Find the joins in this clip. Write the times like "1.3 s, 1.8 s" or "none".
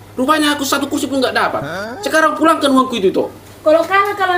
3.4 s